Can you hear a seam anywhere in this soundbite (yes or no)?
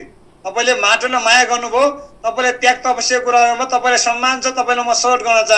no